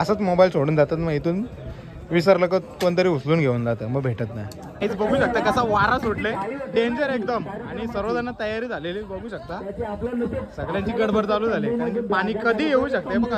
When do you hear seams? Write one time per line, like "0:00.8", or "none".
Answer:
0:04.7